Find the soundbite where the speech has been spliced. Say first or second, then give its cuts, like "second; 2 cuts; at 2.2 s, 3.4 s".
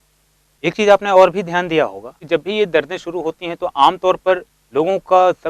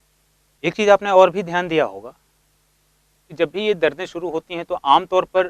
first; 2 cuts; at 2.1 s, 4.6 s